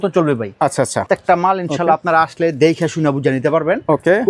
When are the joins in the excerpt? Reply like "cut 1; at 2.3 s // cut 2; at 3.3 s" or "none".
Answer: cut 1; at 1.0 s